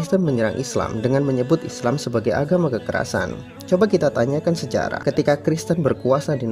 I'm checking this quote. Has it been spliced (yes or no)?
yes